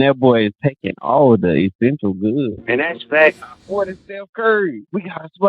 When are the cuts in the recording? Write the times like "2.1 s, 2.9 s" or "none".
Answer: 3.3 s